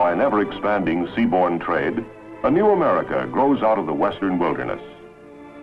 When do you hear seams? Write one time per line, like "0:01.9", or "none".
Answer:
none